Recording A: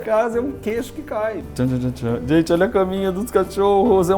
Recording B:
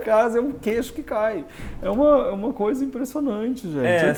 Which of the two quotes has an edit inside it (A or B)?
A